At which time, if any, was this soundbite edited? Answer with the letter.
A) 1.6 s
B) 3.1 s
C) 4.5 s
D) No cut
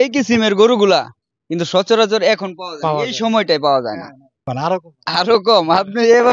C